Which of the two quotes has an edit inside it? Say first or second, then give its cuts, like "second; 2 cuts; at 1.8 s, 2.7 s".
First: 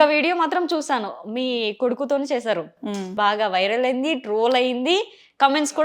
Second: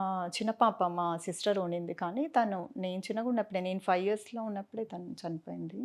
first; 1 cut; at 3.1 s